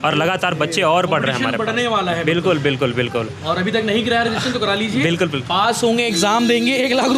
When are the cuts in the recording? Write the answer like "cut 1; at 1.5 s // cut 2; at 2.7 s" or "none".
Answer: none